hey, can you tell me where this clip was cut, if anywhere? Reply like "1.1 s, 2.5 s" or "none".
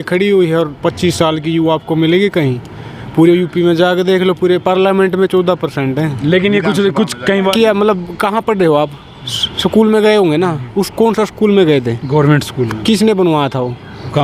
7.5 s